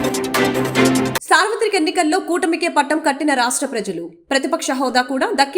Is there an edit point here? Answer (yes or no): yes